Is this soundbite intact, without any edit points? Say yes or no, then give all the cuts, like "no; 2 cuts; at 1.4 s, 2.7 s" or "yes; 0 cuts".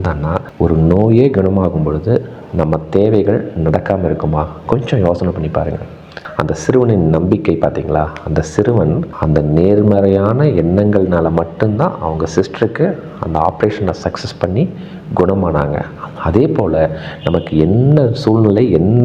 no; 1 cut; at 6.2 s